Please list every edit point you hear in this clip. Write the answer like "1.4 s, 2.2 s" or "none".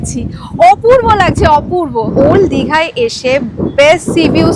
2.1 s